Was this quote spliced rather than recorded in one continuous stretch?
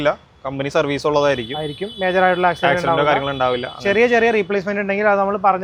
no; 0 cuts

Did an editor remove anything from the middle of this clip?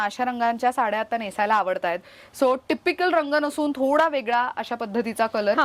no; 0 cuts

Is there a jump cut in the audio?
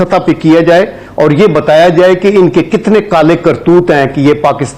no; 0 cuts

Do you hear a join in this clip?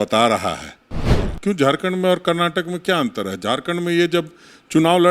yes; 1 cut; at 1.1 s

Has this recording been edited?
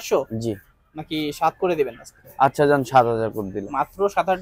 no; 0 cuts

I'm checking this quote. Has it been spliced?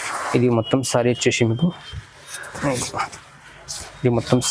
no; 0 cuts

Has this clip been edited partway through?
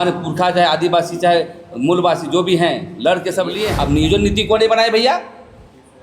yes; 1 cut; at 3.7 s

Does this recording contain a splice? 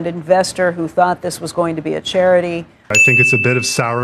yes; 1 cut; at 3.0 s

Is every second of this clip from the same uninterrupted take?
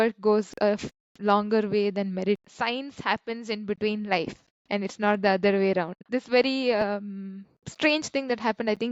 no; 2 cuts; at 2.4 s, 6.0 s

